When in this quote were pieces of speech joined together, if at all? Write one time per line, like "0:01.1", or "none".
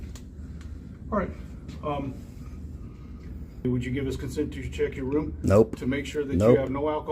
0:03.6